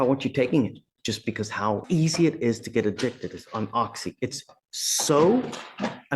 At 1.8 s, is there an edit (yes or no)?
yes